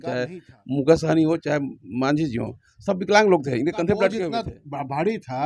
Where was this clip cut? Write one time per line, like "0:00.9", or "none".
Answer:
0:04.3